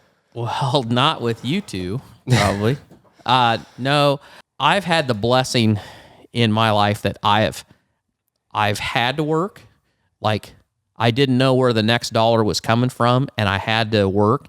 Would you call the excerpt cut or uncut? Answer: cut